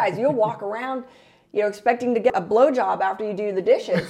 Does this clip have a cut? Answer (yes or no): yes